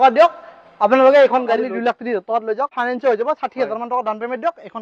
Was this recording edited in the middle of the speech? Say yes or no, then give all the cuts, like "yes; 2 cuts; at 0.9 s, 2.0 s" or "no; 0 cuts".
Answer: yes; 2 cuts; at 1.6 s, 2.7 s